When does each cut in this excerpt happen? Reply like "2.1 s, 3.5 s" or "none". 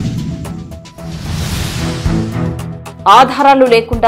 2.9 s